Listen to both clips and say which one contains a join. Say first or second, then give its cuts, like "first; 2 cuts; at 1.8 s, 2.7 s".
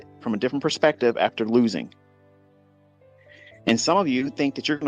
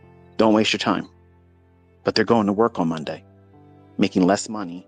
first; 1 cut; at 3.5 s